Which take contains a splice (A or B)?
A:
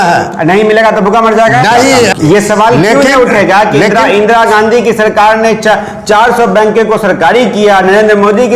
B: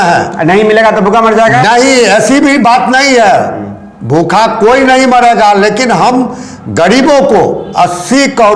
A